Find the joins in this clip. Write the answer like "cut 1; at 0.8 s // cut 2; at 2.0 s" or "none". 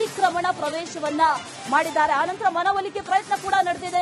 none

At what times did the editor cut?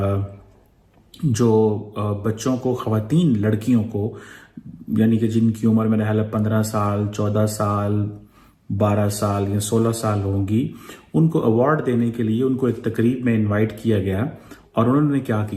none

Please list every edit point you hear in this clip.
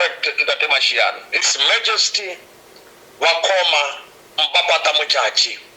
cut 1; at 1.3 s

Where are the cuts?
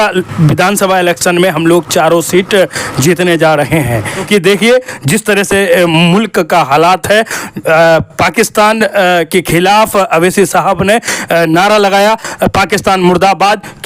cut 1; at 4.2 s

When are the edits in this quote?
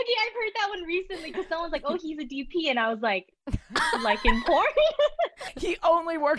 cut 1; at 5.4 s

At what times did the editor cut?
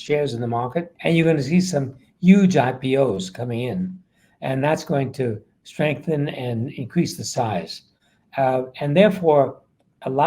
cut 1; at 0.9 s

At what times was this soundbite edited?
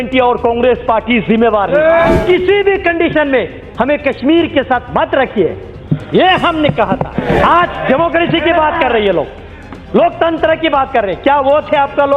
cut 1; at 2.2 s // cut 2; at 7.4 s

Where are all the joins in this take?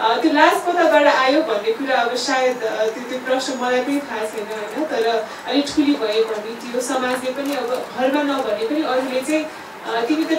none

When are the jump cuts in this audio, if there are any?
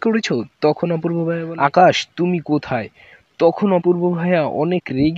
cut 1; at 1.5 s

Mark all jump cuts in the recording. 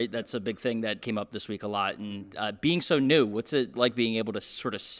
cut 1; at 1.0 s // cut 2; at 3.8 s

